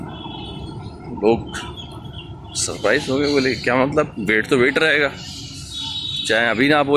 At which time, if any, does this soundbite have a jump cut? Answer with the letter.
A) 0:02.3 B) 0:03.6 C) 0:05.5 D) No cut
D